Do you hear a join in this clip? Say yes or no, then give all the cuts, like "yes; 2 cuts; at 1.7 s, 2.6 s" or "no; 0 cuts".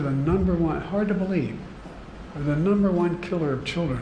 no; 0 cuts